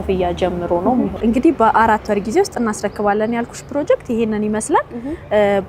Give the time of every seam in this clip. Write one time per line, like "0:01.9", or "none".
0:01.1